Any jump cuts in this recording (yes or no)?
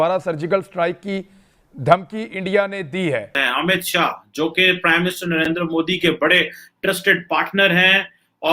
yes